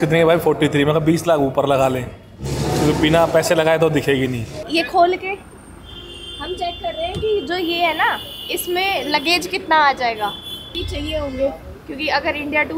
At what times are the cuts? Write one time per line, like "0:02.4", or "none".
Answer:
0:04.5
0:10.7